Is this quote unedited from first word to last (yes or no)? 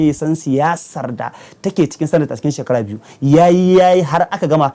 yes